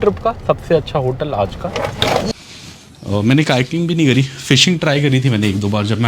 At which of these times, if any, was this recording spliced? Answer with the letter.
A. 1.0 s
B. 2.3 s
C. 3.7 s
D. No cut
B